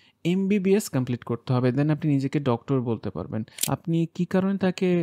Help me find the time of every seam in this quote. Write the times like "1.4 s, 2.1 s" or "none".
3.5 s